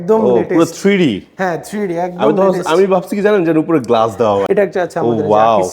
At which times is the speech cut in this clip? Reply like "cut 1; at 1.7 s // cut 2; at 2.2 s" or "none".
cut 1; at 4.5 s